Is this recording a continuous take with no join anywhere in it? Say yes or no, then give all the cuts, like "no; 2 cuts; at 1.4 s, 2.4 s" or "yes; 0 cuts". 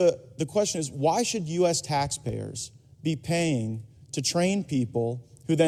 yes; 0 cuts